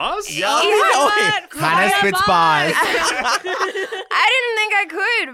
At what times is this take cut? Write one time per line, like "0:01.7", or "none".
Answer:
none